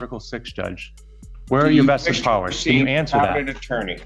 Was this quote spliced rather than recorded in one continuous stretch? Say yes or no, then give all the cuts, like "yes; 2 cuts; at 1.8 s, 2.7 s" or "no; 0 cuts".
no; 0 cuts